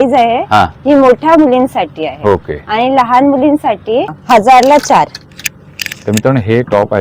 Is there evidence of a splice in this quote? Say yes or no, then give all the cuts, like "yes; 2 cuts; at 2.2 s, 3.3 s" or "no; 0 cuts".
yes; 1 cut; at 4.1 s